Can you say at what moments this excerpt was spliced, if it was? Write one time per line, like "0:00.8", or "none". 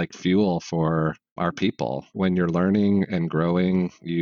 0:01.3